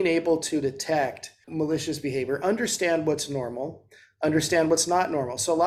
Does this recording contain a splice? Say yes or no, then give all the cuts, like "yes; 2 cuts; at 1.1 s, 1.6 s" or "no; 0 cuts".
yes; 1 cut; at 1.4 s